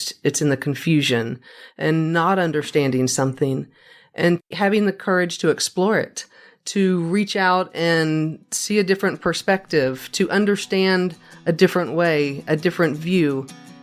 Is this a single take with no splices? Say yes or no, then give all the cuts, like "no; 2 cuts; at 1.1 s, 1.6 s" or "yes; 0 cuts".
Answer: yes; 0 cuts